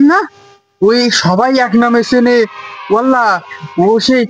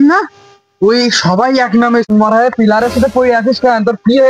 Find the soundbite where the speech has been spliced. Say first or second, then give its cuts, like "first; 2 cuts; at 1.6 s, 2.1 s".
second; 1 cut; at 2.1 s